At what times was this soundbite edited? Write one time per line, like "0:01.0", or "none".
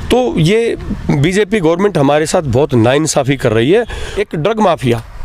0:04.1